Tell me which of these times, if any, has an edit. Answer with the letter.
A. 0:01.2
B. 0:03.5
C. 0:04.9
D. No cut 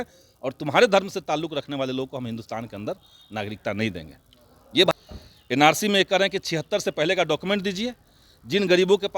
C